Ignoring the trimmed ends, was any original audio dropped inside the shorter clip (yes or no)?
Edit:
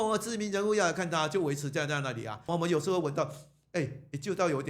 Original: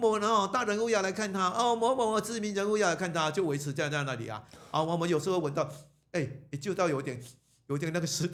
yes